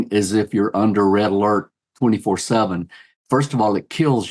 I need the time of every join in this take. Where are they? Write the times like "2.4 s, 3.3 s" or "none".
3.1 s